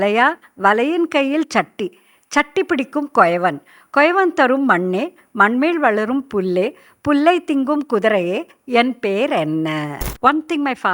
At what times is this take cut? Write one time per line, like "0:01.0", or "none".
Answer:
0:10.0